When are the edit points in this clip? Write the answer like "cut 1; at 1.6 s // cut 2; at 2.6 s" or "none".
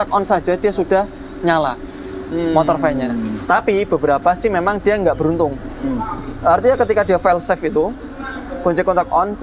none